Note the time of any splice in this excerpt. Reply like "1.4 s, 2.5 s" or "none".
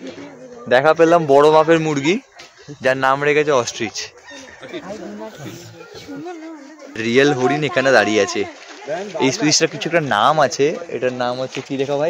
6.9 s